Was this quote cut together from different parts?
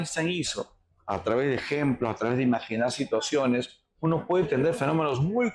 no; 0 cuts

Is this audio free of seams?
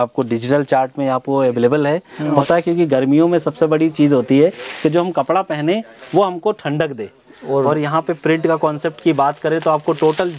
no; 2 cuts; at 2.4 s, 7.7 s

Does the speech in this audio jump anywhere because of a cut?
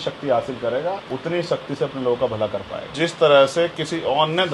yes; 2 cuts; at 1.1 s, 2.9 s

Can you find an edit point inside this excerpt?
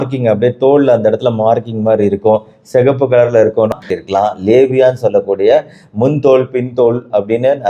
yes; 1 cut; at 3.8 s

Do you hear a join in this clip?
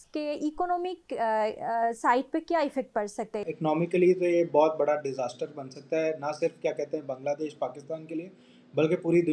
yes; 1 cut; at 3.5 s

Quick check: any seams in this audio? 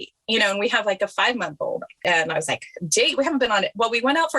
yes; 1 cut; at 2.0 s

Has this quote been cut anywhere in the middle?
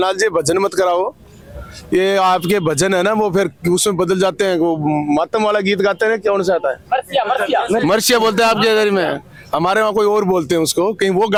no; 0 cuts

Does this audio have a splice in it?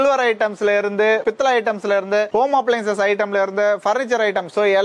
no; 0 cuts

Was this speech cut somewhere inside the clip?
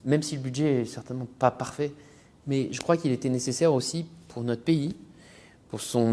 no; 0 cuts

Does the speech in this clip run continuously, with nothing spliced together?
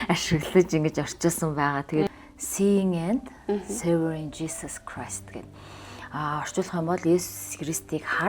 no; 1 cut; at 2.1 s

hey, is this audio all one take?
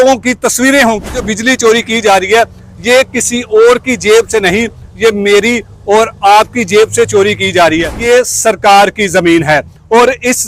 no; 2 cuts; at 1.3 s, 8.0 s

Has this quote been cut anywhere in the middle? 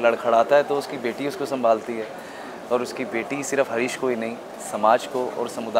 no; 0 cuts

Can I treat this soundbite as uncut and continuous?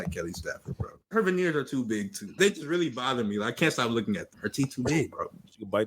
no; 3 cuts; at 1.0 s, 2.3 s, 4.4 s

